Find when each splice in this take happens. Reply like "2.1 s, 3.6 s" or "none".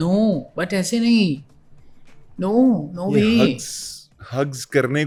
none